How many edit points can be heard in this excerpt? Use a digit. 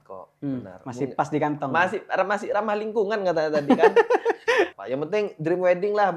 1